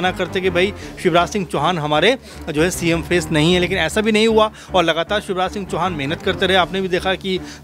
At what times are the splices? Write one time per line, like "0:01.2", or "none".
none